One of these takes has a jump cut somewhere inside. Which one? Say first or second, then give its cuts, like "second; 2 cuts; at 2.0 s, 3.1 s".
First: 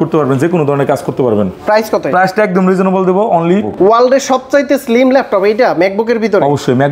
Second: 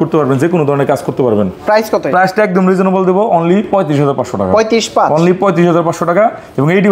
first; 1 cut; at 3.7 s